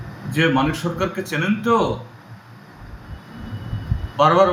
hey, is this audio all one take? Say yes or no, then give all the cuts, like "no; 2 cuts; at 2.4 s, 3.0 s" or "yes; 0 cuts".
yes; 0 cuts